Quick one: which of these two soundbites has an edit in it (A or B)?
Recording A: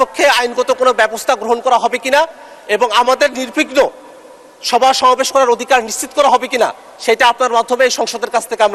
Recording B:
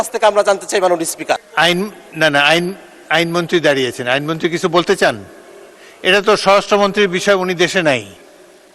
B